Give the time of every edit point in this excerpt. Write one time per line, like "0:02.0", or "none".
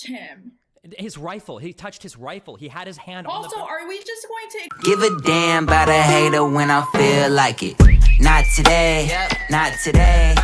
0:04.7